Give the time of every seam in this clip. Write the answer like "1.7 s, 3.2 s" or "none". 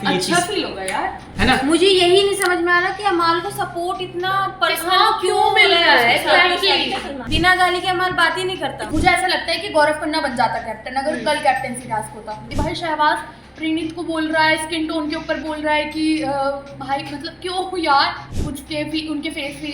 1.2 s, 7.2 s, 8.8 s, 12.5 s, 18.3 s